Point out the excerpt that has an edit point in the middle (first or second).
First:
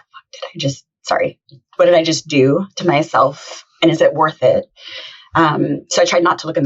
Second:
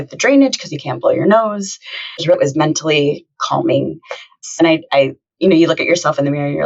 second